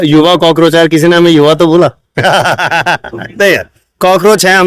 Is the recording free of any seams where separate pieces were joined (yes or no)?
yes